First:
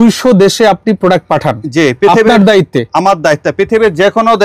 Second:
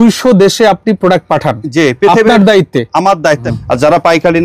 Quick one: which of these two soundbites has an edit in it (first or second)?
second